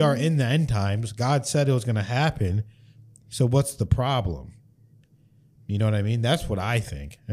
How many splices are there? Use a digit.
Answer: 0